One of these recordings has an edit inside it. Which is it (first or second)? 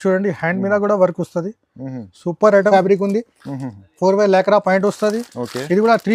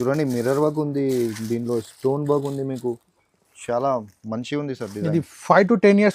first